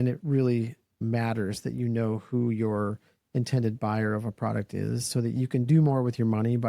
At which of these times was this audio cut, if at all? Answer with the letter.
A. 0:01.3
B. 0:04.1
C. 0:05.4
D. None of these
C